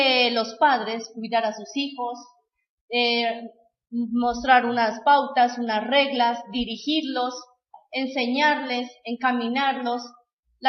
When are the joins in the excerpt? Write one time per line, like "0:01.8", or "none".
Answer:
0:01.2